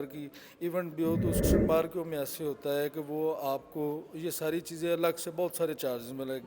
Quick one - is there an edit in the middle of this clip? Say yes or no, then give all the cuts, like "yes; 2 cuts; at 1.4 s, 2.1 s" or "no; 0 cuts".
yes; 1 cut; at 1.5 s